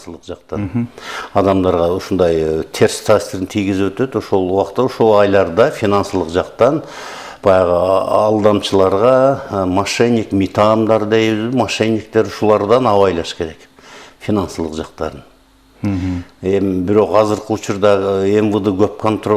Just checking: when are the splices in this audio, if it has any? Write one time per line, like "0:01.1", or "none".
none